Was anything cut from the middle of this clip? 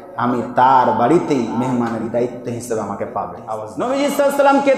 yes; 1 cut; at 3.7 s

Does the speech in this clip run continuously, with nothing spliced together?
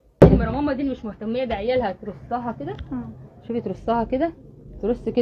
yes; 0 cuts

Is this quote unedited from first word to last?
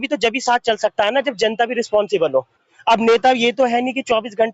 yes; 0 cuts

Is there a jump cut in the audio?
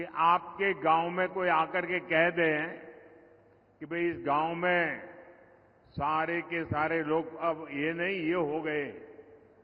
no; 0 cuts

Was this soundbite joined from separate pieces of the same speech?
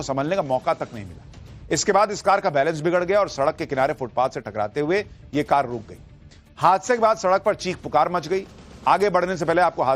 yes; 1 cut; at 4.4 s

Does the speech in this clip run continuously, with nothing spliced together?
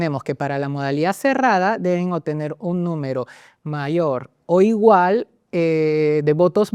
yes; 0 cuts

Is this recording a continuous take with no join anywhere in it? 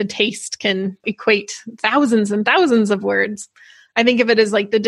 yes; 0 cuts

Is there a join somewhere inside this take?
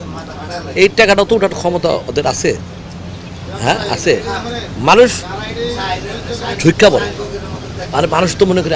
no; 0 cuts

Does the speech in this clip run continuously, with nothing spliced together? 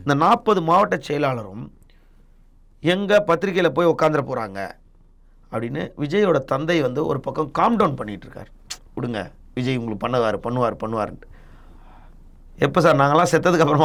yes; 0 cuts

